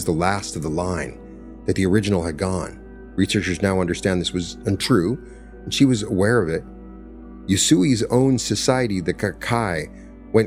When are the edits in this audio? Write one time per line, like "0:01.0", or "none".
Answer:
none